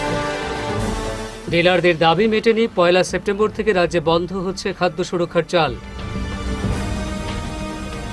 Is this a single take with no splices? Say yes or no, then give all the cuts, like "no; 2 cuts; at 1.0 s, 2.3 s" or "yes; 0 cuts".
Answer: no; 1 cut; at 1.2 s